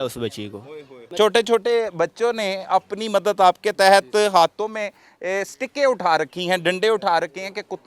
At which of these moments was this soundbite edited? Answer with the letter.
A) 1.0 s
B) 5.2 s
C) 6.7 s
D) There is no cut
A